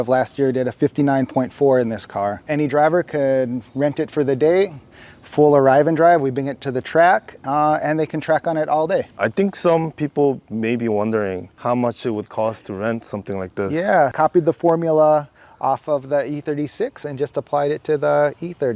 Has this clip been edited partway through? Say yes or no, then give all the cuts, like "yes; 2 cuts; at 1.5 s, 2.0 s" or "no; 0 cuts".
yes; 3 cuts; at 2.5 s, 9.2 s, 14.1 s